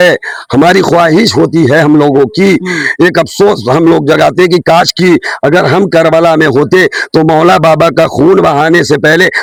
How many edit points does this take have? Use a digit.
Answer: 0